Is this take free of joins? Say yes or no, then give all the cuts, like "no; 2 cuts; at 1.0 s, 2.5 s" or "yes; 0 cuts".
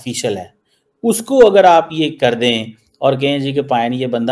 yes; 0 cuts